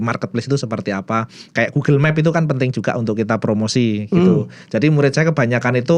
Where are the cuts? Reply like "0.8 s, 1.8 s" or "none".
none